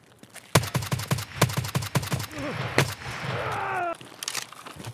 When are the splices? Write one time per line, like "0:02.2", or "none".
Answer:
0:03.9

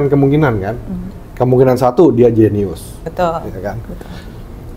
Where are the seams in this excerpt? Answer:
0:03.0

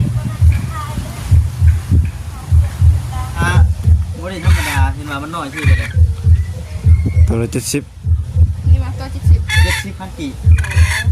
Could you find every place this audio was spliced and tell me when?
0:03.4

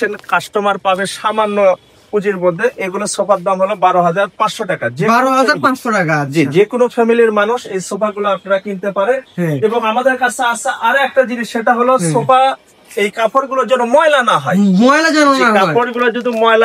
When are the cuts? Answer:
none

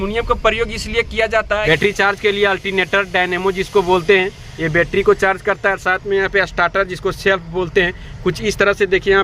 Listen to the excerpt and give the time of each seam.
0:01.6

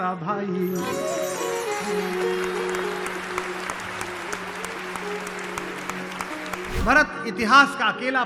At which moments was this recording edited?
0:06.8

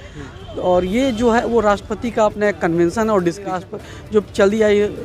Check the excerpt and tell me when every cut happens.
0:03.5

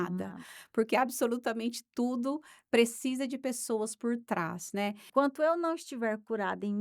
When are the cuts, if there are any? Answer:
0:05.0

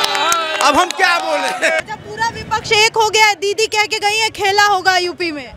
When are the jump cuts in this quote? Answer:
0:01.8

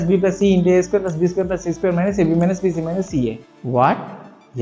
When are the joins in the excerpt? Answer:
0:03.5

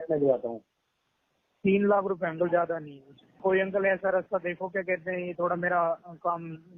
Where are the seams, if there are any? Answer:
0:03.4

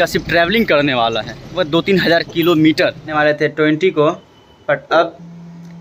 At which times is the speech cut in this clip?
0:01.5
0:03.1

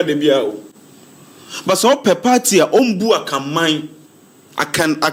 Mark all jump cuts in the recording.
none

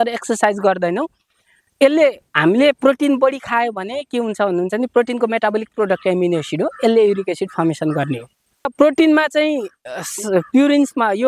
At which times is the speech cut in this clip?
0:08.7

